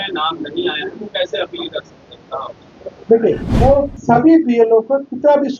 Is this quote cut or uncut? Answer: cut